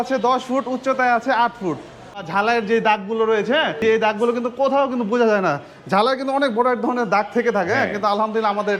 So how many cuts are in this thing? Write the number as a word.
two